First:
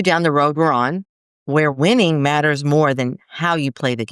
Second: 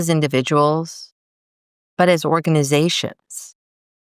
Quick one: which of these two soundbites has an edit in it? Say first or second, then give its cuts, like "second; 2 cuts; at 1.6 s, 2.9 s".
first; 1 cut; at 1.7 s